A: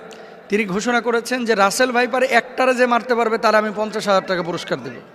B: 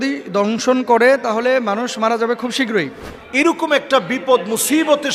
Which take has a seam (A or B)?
B